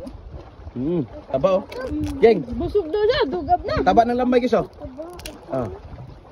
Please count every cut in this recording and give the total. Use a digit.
1